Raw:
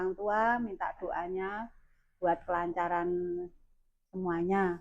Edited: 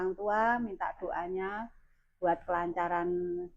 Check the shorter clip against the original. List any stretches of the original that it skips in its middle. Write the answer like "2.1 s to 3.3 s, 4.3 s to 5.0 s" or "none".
none